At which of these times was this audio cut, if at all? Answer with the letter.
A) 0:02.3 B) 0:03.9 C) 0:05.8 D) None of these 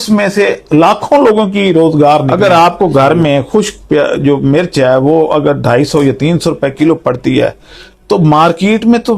A